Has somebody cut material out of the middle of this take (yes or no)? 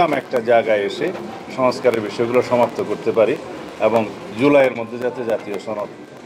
no